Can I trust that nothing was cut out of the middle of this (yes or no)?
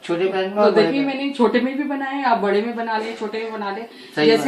yes